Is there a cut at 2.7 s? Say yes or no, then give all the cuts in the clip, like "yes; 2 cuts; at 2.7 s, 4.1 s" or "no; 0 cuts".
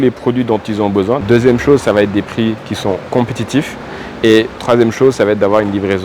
no; 2 cuts; at 1.2 s, 4.5 s